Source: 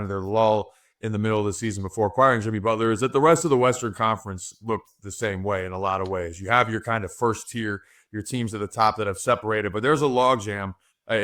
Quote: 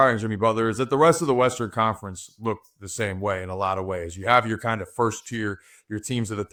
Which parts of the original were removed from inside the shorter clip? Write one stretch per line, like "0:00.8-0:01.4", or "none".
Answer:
none